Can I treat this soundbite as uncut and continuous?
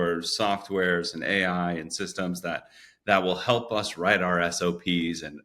yes; 0 cuts

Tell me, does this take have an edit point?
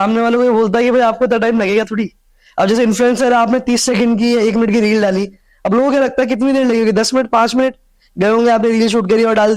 no; 0 cuts

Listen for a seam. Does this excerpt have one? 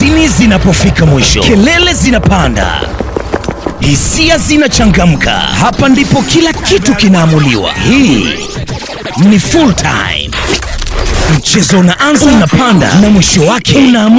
no; 0 cuts

